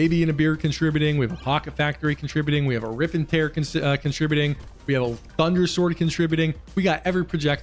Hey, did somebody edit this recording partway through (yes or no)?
no